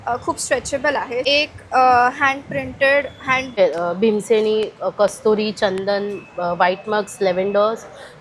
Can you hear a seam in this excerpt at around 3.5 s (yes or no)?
yes